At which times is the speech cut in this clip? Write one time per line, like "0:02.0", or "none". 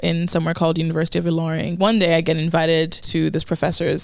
0:01.7
0:03.0